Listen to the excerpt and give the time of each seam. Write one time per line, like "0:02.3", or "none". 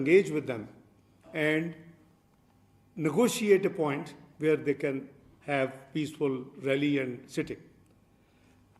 none